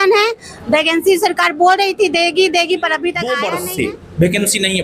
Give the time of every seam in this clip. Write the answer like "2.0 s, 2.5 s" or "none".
3.3 s